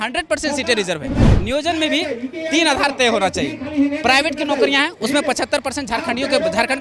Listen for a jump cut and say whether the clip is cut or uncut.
cut